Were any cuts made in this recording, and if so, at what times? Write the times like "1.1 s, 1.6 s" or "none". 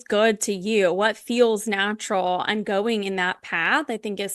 none